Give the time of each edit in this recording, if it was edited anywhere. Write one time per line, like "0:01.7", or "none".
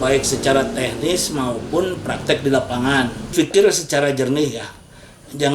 0:03.3